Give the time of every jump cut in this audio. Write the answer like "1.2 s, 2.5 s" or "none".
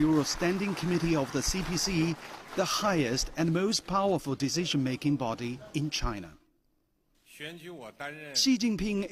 2.2 s